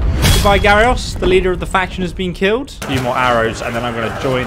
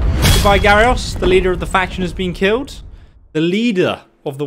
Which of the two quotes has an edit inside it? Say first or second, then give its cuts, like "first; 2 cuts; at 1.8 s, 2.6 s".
first; 1 cut; at 2.8 s